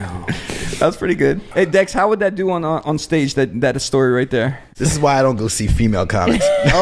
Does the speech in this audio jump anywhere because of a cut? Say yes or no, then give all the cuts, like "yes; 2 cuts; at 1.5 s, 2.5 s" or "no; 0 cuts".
yes; 2 cuts; at 1.4 s, 4.6 s